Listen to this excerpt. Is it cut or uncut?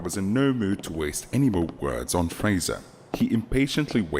uncut